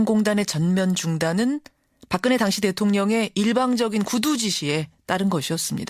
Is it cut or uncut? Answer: uncut